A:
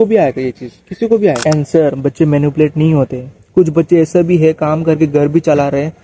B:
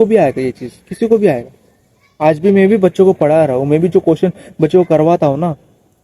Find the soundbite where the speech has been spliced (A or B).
A